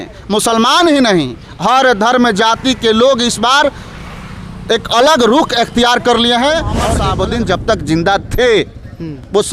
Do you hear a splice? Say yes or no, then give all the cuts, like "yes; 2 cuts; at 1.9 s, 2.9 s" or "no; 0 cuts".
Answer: yes; 1 cut; at 6.9 s